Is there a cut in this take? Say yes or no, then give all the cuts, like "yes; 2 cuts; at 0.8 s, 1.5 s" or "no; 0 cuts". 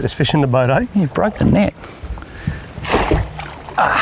no; 0 cuts